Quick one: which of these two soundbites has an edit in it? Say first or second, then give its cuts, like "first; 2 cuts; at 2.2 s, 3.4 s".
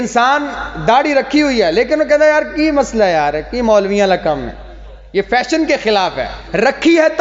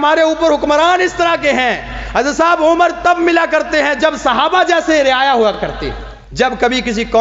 second; 1 cut; at 5.7 s